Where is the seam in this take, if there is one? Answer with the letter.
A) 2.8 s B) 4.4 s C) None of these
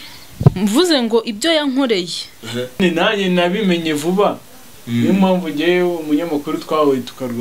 A